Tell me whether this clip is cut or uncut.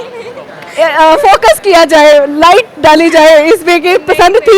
uncut